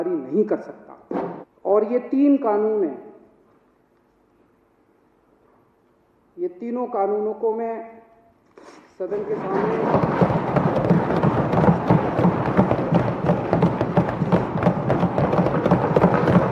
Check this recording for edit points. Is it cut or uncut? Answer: cut